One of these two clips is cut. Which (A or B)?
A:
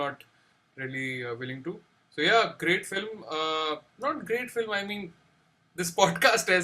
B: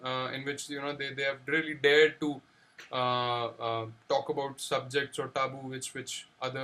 A